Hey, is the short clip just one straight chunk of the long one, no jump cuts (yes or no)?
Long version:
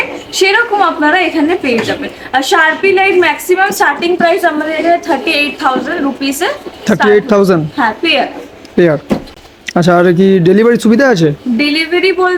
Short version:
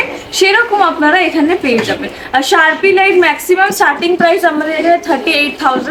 yes